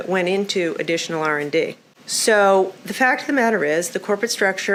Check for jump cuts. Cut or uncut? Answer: uncut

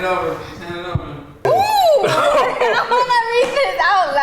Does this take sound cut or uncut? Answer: cut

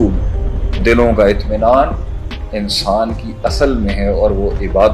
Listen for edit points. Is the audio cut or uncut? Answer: uncut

